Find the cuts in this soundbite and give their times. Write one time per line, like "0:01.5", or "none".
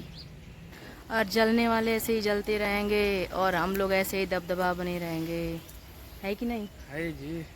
none

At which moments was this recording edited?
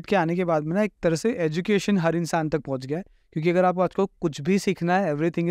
none

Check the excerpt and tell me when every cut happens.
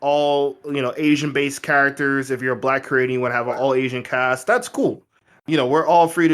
0:05.2

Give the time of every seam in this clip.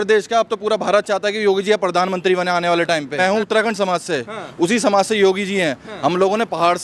0:03.1

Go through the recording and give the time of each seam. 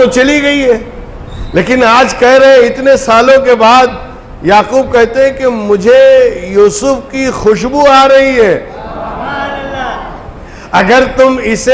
none

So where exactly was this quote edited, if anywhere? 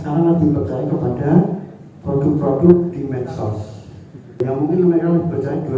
0:04.4

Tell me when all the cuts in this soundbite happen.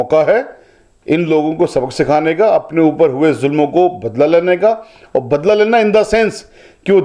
none

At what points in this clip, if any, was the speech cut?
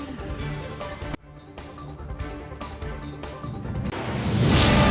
0:01.2
0:03.7

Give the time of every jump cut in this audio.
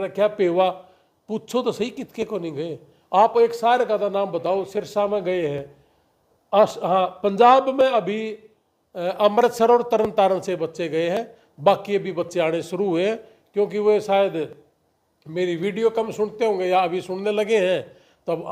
none

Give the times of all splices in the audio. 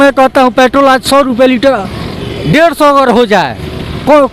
none

